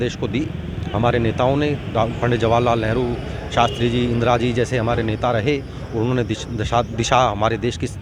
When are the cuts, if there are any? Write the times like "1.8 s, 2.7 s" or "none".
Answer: none